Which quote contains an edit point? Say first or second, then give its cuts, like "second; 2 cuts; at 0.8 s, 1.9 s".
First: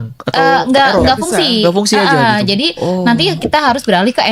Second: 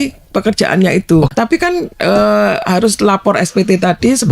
second; 1 cut; at 1.3 s